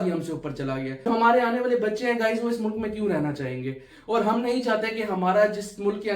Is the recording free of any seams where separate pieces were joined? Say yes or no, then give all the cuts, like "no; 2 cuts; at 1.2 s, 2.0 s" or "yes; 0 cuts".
no; 1 cut; at 1.0 s